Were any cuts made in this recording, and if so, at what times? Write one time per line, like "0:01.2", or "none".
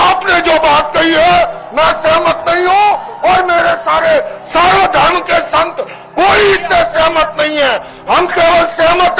none